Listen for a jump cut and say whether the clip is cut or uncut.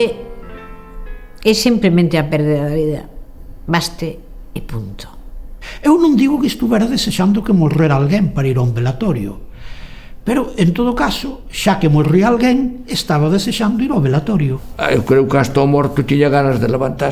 cut